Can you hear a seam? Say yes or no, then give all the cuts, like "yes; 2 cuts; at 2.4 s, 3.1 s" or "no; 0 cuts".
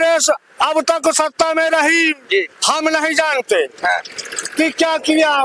no; 0 cuts